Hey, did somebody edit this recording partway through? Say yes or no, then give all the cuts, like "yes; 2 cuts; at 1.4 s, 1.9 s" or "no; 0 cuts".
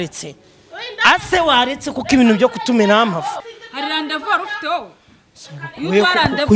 yes; 1 cut; at 3.4 s